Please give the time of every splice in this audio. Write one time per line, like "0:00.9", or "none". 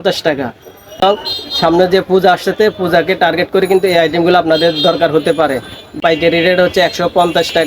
0:01.0
0:06.0